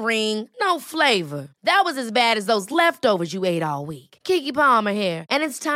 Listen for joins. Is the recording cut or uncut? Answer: uncut